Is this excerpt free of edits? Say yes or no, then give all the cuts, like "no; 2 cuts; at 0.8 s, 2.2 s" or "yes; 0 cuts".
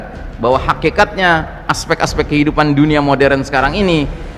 yes; 0 cuts